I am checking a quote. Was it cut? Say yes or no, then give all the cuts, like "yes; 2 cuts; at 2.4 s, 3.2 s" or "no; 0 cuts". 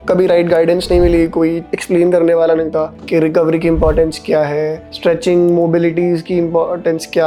no; 0 cuts